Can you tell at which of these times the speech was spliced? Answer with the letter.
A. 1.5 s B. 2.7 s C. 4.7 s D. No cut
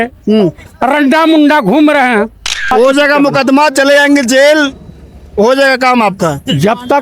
B